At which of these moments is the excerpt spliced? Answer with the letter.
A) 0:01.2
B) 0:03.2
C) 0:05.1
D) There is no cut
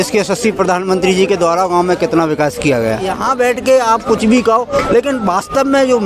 B